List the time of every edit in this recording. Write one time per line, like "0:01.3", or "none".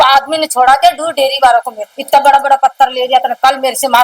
0:01.8